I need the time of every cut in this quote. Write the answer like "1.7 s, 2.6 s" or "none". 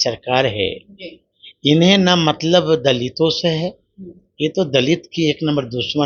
none

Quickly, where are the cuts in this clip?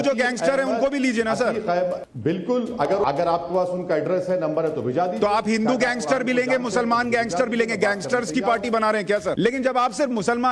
2.1 s, 3.0 s, 9.3 s

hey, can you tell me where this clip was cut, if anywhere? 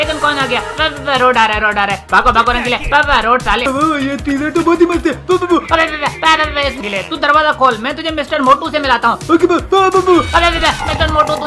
3.7 s, 6.8 s

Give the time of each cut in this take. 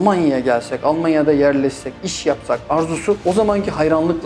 3.2 s

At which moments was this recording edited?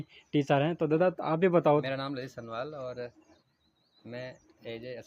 1.8 s

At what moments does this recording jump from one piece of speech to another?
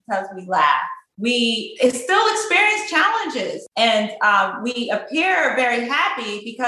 1.0 s, 3.6 s

